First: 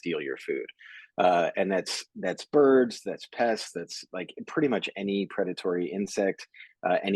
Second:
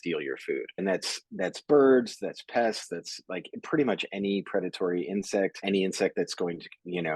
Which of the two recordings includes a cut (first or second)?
second